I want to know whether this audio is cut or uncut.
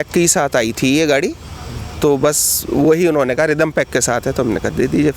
uncut